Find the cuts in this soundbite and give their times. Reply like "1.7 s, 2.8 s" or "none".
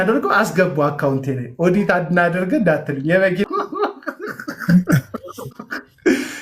3.4 s

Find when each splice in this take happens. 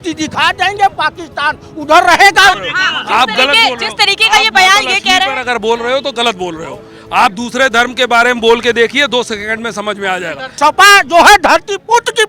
2.7 s, 10.5 s

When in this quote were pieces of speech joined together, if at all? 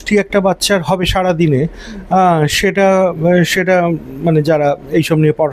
none

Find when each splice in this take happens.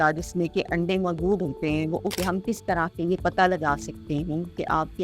2.2 s

